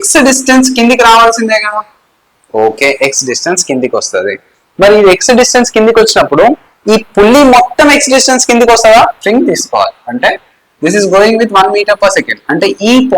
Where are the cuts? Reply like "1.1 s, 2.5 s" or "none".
9.2 s